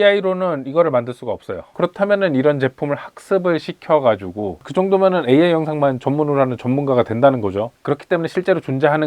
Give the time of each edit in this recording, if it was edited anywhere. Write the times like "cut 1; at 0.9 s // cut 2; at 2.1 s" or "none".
cut 1; at 1.6 s // cut 2; at 4.5 s // cut 3; at 7.7 s